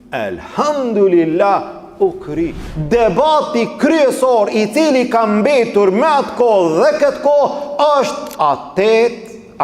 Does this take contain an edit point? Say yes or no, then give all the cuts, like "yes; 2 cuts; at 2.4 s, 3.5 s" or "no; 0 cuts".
yes; 2 cuts; at 2.7 s, 8.2 s